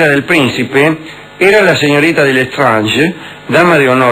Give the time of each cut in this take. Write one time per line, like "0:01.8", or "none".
0:02.1